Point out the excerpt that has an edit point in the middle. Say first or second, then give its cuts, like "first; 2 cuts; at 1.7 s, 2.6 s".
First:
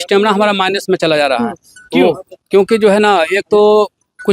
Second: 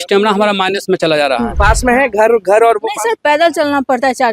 second; 1 cut; at 1.5 s